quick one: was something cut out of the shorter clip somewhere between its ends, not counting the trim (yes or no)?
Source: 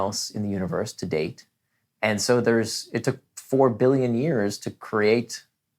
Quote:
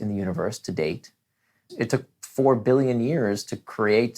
yes